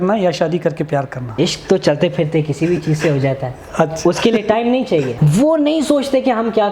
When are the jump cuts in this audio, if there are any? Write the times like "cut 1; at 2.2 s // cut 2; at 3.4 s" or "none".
cut 1; at 1.2 s // cut 2; at 5.1 s